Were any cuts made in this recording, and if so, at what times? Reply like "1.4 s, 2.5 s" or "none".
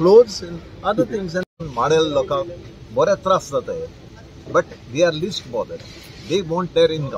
1.5 s